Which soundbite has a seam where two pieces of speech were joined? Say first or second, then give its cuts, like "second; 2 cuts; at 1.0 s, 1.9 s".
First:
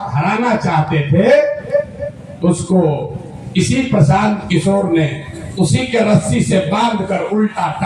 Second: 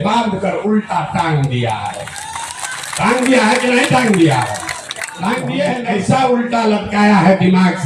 second; 1 cut; at 5.7 s